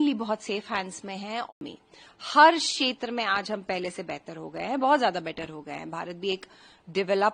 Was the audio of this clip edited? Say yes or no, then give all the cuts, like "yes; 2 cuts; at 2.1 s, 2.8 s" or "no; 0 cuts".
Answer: yes; 1 cut; at 1.5 s